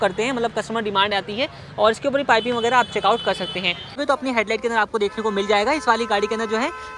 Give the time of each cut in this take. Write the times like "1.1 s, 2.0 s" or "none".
4.0 s